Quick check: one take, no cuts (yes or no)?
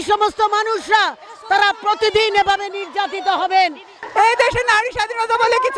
no